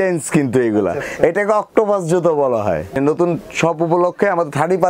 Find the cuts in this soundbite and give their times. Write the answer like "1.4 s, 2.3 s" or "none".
2.9 s